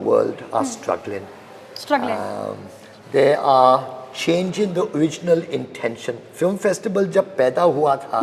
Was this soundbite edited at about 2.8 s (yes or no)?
no